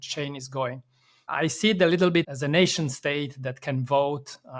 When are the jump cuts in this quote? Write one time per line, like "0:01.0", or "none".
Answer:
0:01.3
0:02.2